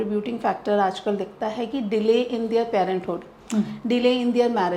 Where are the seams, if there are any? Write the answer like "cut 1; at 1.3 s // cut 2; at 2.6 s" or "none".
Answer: none